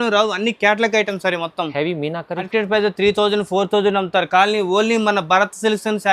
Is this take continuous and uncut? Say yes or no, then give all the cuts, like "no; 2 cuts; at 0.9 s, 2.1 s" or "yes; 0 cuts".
no; 1 cut; at 2.5 s